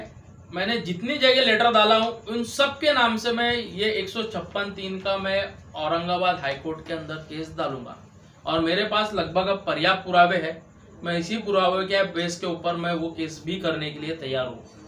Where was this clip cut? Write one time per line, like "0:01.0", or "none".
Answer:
none